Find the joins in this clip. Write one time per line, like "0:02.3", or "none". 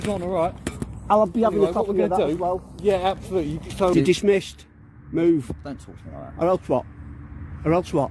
0:03.9